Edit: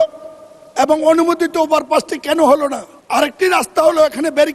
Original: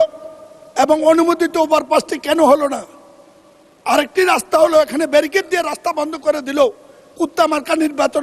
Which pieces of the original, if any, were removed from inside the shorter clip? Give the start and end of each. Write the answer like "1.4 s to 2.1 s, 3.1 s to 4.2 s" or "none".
2.9 s to 3.7 s